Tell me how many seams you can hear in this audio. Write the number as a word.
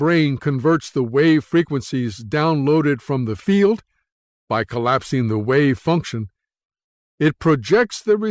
one